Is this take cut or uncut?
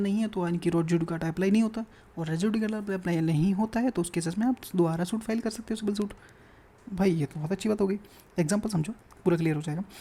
uncut